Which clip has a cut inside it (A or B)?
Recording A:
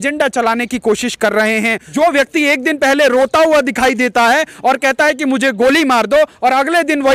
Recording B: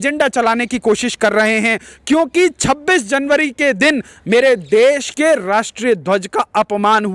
A